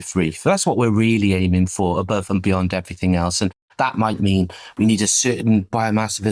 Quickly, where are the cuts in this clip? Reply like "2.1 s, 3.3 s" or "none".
none